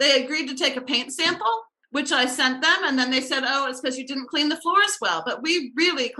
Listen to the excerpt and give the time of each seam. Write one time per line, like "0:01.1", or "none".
0:01.8

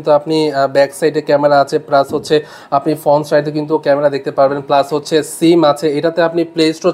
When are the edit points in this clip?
none

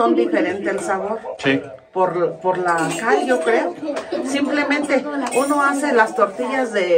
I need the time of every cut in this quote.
none

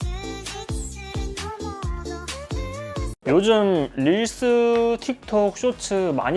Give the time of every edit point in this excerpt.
0:02.3
0:03.1

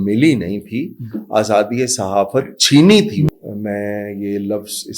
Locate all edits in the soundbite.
0:03.3

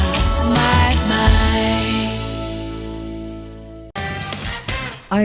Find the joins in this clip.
0:03.9

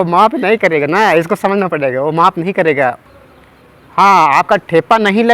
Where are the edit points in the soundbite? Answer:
0:03.1

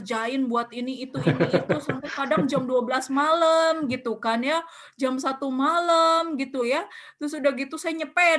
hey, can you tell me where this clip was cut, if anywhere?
none

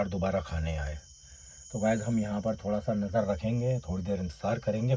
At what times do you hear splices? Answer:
none

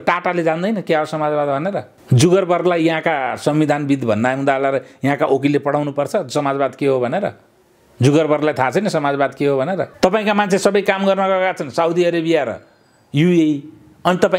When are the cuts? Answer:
0:01.9
0:09.9

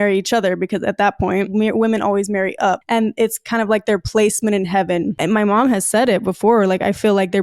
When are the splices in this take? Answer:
0:01.5
0:05.1

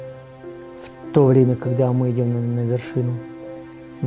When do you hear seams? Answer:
0:01.1

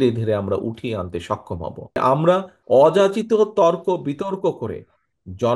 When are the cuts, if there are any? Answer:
0:02.0
0:02.5

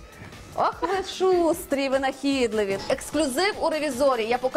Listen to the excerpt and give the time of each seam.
0:02.8

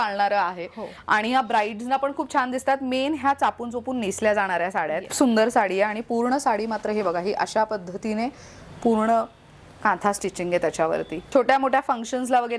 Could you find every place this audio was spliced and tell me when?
0:05.1
0:11.2

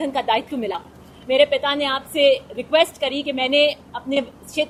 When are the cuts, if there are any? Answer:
none

